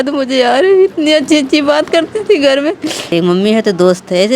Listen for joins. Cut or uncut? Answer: cut